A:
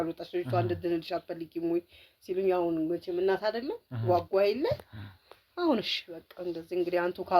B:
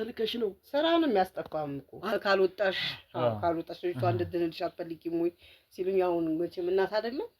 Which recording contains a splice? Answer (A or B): B